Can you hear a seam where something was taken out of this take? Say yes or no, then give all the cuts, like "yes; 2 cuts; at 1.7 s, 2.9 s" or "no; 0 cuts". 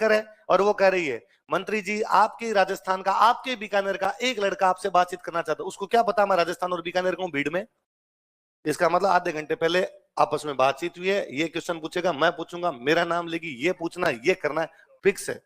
no; 0 cuts